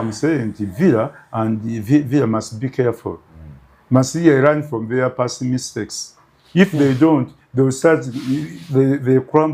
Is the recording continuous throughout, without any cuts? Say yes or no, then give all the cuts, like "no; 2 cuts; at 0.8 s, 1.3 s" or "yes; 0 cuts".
yes; 0 cuts